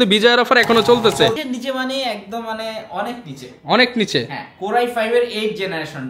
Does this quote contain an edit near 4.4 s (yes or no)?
no